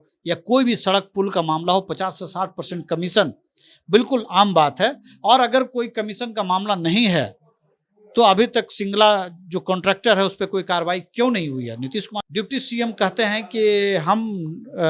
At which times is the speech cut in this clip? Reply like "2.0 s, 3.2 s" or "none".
12.2 s